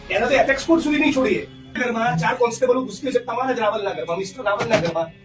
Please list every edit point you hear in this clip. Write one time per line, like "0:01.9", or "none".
0:01.8